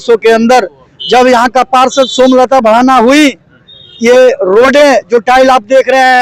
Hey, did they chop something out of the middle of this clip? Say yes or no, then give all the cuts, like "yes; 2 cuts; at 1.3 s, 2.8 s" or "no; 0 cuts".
no; 0 cuts